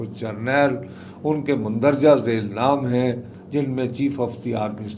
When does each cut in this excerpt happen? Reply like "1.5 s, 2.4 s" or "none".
none